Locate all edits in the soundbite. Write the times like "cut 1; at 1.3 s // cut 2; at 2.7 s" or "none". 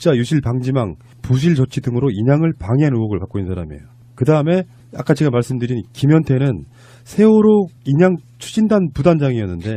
cut 1; at 3.3 s